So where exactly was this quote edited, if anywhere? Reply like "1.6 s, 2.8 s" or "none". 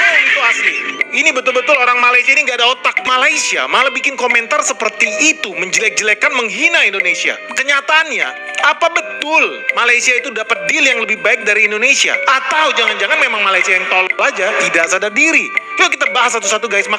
3.0 s